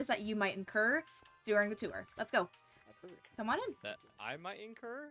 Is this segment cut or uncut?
uncut